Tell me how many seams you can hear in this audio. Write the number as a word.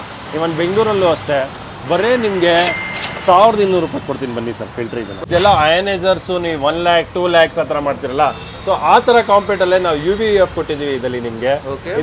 one